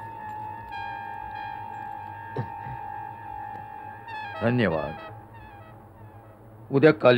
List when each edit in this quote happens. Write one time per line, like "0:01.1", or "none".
none